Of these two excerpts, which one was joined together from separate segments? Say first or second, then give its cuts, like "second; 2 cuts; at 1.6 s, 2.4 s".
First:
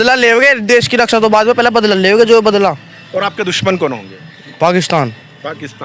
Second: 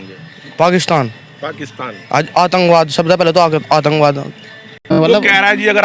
second; 1 cut; at 4.9 s